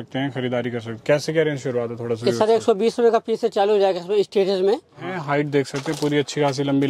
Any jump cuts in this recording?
yes; 1 cut; at 5.1 s

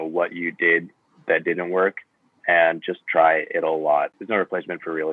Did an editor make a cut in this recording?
yes; 1 cut; at 4.2 s

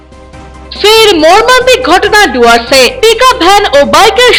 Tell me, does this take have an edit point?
no; 0 cuts

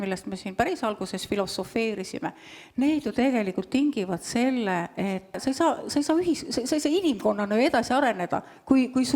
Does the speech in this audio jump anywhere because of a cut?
yes; 1 cut; at 5.4 s

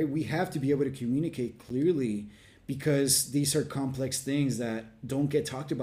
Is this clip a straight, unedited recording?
yes; 0 cuts

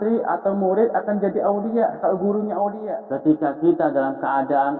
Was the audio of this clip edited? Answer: yes; 1 cut; at 2.9 s

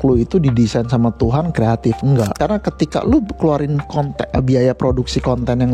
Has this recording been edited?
yes; 1 cut; at 2.3 s

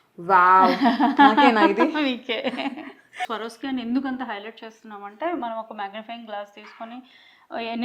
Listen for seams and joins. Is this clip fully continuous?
no; 1 cut; at 3.3 s

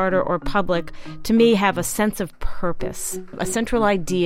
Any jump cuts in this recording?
yes; 1 cut; at 3.3 s

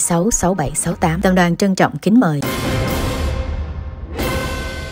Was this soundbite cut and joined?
yes; 1 cut; at 2.4 s

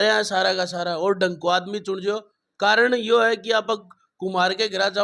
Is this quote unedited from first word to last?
yes; 0 cuts

